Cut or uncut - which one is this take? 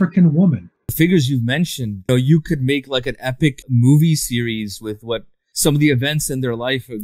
cut